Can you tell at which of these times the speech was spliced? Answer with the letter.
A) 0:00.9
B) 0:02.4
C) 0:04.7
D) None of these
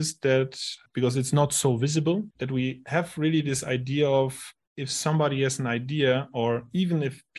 B